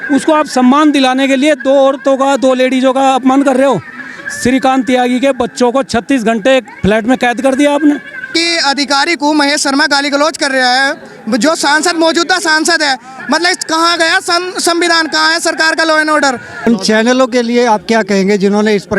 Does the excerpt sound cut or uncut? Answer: cut